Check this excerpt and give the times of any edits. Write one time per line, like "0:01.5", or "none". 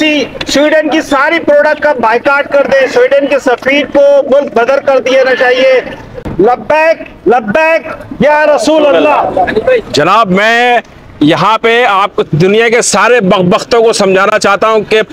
none

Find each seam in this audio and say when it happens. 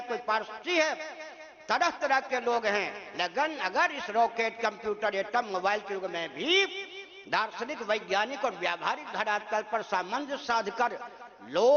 none

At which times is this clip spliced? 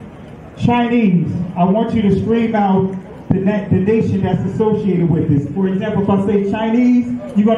none

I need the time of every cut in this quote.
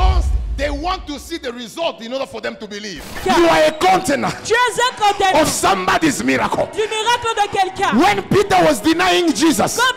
0:03.2

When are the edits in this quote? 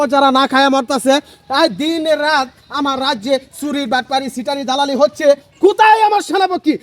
none

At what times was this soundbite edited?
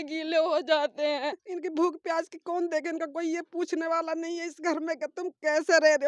0:01.4

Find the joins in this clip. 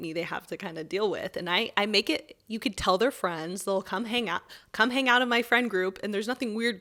none

